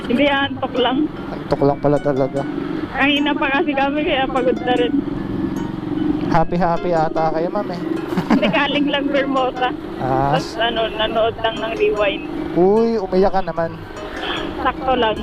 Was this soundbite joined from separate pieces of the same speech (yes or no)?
yes